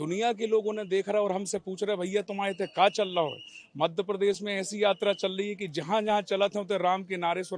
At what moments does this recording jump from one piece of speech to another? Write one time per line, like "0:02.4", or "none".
none

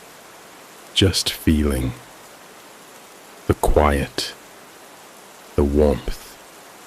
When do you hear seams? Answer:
0:02.0
0:03.5

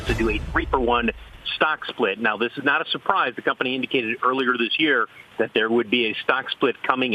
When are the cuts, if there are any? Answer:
none

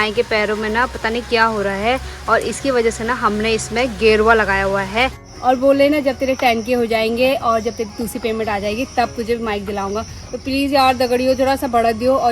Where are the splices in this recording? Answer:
0:05.3

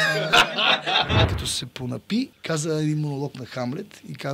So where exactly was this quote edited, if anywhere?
0:01.3
0:02.4

